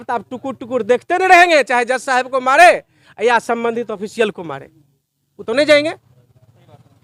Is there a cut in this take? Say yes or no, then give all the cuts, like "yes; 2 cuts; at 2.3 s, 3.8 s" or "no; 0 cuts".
no; 0 cuts